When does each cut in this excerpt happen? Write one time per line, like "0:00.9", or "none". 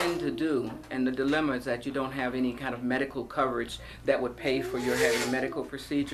none